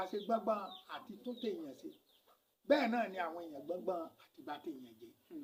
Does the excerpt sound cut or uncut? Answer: uncut